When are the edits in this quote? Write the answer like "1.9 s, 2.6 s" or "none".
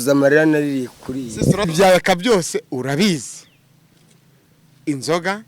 1.7 s